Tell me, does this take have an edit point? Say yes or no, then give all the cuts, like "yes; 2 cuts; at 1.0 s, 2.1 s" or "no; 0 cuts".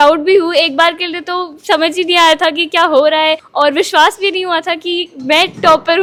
no; 0 cuts